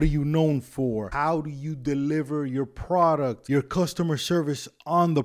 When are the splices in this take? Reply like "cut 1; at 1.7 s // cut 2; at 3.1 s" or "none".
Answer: cut 1; at 1.1 s // cut 2; at 3.4 s